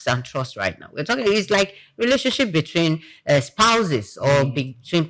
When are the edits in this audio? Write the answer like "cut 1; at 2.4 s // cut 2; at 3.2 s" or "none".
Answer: none